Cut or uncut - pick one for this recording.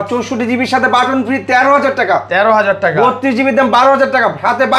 uncut